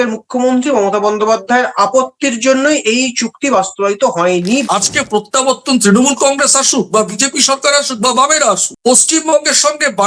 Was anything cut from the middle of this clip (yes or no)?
yes